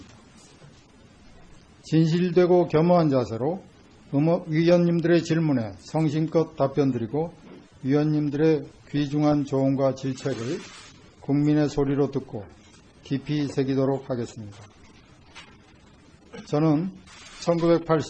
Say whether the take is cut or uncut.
cut